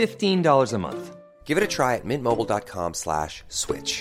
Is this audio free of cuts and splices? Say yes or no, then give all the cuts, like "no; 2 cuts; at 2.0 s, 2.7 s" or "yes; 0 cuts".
yes; 0 cuts